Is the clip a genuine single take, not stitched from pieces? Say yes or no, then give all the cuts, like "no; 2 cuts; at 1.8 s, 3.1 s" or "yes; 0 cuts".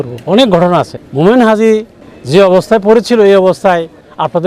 yes; 0 cuts